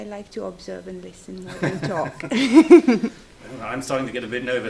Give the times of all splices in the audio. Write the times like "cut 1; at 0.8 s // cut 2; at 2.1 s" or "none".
none

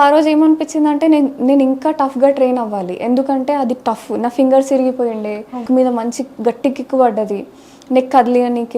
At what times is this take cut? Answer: cut 1; at 5.6 s

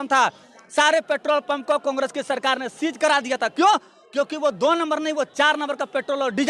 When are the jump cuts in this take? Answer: none

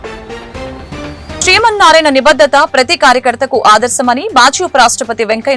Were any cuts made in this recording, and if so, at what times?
cut 1; at 1.4 s

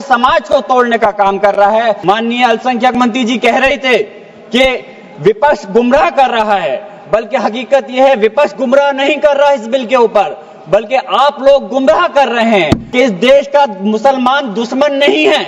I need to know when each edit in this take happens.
cut 1; at 2.0 s // cut 2; at 12.8 s

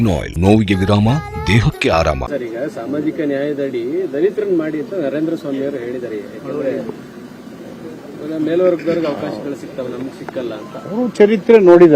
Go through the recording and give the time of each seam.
cut 1; at 2.2 s

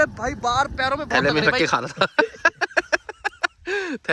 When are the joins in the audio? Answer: cut 1; at 1.2 s

